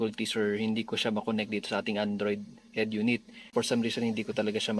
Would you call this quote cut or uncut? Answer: cut